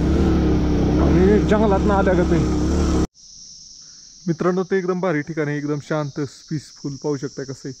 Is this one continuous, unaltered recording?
no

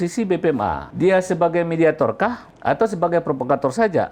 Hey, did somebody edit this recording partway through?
yes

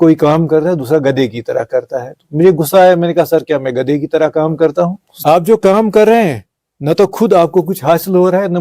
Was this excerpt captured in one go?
no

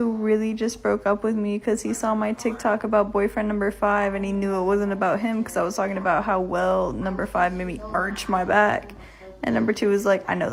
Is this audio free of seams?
yes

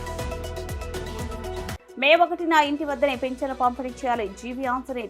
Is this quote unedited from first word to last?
no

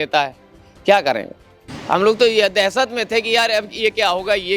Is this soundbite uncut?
no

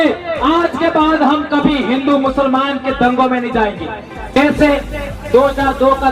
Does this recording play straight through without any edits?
no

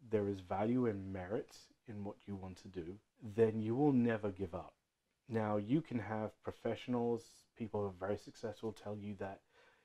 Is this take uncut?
no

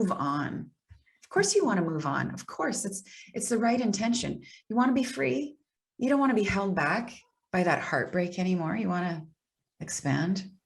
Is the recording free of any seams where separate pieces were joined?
yes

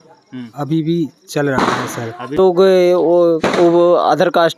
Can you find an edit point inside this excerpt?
yes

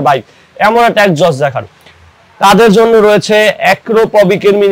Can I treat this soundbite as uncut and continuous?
yes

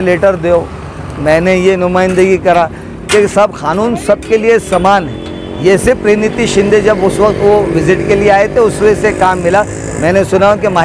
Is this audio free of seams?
yes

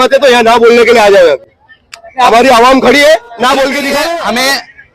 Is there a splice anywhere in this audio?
yes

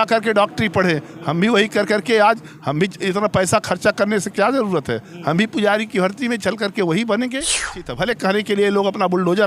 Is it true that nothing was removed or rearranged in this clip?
no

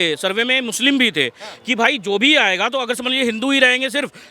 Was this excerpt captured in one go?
yes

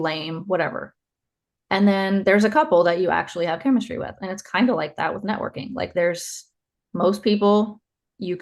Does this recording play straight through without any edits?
yes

